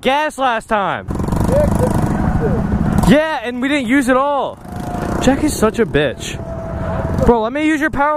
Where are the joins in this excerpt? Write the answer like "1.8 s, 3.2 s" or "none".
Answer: none